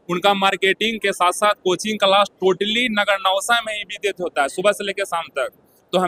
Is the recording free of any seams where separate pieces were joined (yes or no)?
yes